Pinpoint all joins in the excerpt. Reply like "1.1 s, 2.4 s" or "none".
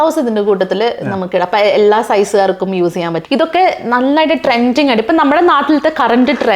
3.2 s